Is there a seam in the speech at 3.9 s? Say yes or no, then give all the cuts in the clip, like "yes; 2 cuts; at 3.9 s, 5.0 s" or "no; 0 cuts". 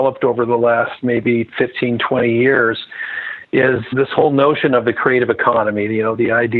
yes; 1 cut; at 3.9 s